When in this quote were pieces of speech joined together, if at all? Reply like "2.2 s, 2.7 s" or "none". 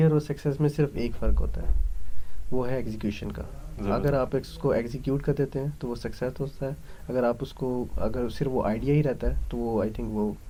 none